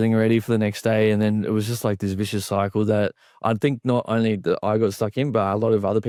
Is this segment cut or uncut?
uncut